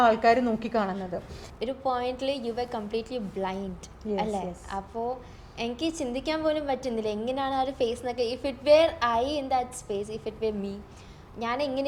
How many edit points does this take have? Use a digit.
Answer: 1